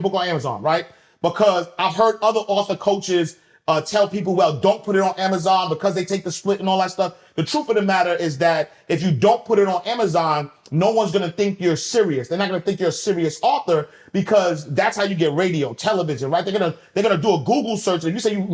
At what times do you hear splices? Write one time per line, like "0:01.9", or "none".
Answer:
none